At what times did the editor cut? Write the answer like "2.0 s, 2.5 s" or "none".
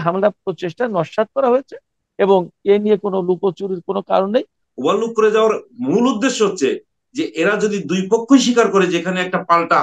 4.6 s